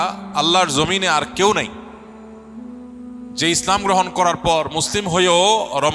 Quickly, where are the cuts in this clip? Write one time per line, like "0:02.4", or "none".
none

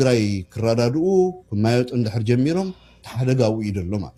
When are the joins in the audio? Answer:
none

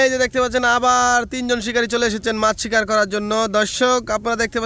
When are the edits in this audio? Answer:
none

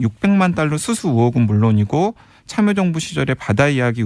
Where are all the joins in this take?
0:02.8

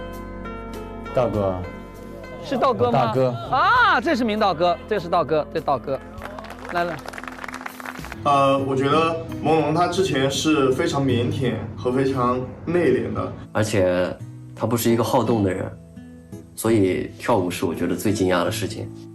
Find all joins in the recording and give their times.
0:08.1

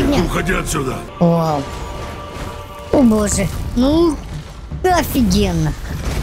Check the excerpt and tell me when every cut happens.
0:01.1

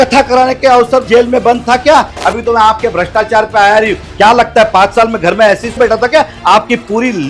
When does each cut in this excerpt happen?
0:01.0
0:02.2
0:05.8

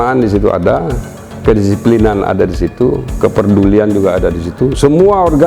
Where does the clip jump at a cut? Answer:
none

